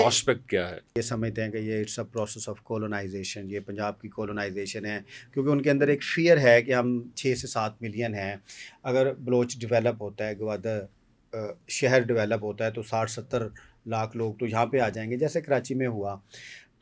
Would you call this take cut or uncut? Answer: cut